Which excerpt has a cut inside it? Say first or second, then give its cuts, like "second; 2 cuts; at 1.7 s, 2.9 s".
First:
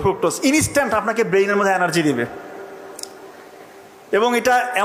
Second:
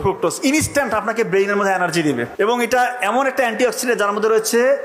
second; 1 cut; at 2.3 s